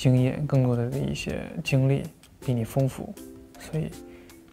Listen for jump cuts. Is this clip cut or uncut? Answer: uncut